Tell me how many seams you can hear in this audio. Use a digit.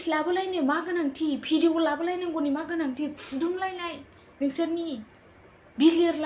0